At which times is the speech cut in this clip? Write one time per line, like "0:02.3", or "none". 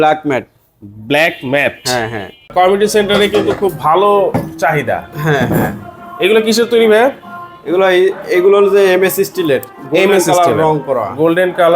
0:02.5